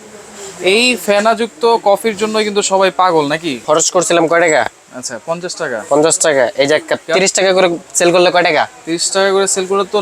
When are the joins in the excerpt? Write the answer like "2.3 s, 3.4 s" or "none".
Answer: 3.5 s, 7.0 s